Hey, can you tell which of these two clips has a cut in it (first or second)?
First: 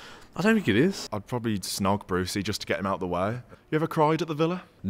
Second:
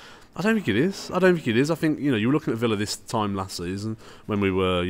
first